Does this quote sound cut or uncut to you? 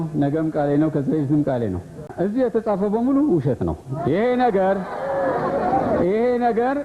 cut